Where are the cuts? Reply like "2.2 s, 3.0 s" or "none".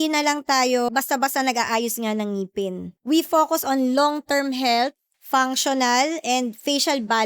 0.9 s, 2.9 s, 5.1 s